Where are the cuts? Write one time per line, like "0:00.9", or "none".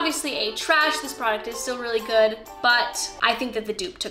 none

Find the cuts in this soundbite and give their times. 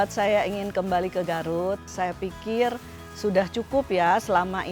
0:01.8

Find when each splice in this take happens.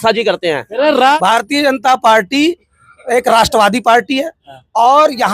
0:01.1

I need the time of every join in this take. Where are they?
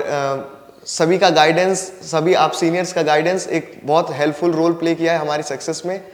none

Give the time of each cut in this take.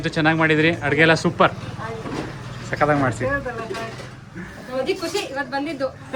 none

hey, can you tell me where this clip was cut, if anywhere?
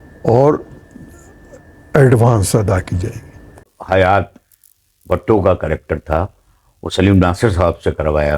0:03.6

